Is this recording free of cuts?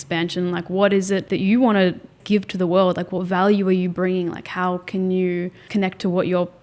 no; 3 cuts; at 1.2 s, 2.2 s, 5.7 s

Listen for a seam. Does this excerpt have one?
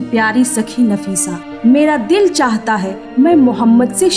no; 0 cuts

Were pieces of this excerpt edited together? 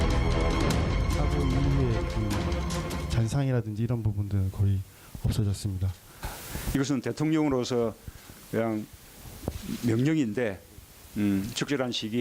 no; 0 cuts

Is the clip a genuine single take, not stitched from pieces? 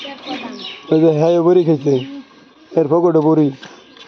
yes; 0 cuts

